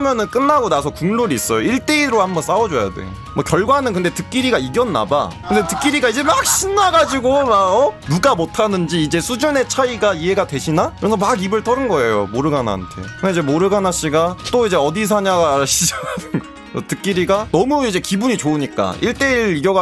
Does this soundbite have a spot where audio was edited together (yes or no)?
no